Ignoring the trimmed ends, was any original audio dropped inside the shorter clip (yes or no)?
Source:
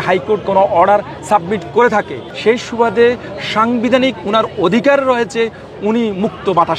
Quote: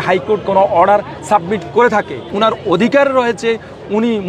yes